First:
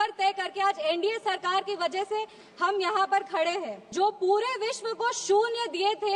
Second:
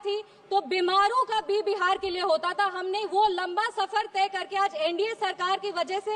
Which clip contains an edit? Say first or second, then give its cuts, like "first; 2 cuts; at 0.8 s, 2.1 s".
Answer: first; 1 cut; at 3.8 s